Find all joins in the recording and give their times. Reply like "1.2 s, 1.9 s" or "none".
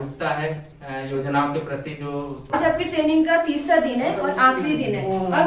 2.5 s